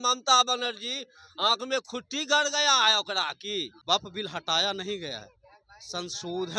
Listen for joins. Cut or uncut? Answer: cut